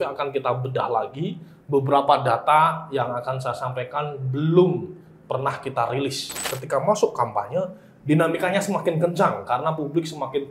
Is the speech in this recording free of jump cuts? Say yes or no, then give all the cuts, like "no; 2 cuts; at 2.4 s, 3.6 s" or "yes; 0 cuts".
no; 1 cut; at 6.5 s